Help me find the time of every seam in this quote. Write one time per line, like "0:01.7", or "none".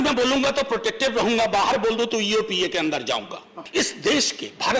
0:03.6

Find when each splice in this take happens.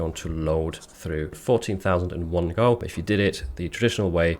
0:01.4

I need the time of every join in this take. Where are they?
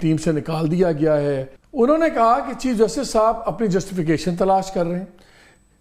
0:01.6

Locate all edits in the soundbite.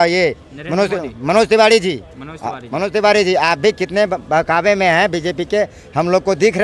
none

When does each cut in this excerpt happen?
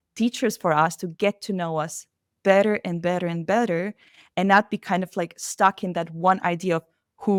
none

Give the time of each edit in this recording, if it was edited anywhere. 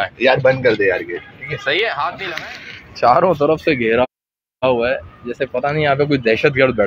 0:02.3

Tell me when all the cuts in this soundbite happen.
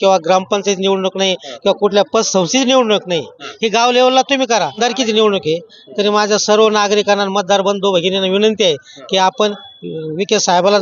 0:04.8

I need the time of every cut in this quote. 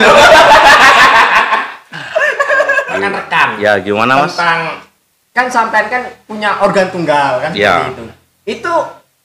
0:02.9

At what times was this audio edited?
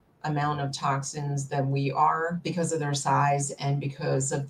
0:02.4

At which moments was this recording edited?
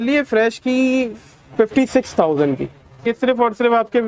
0:03.0

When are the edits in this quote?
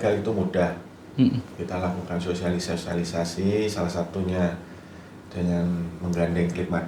none

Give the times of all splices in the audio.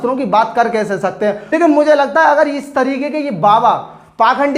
0:01.4

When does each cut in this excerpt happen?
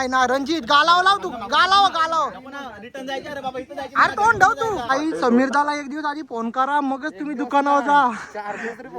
0:04.9

